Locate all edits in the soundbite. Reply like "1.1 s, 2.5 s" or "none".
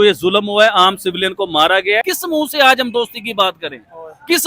2.1 s